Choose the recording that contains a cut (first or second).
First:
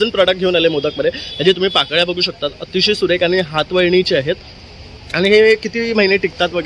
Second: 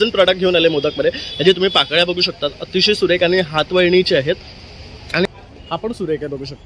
second